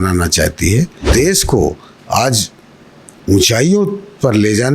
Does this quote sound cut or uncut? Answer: cut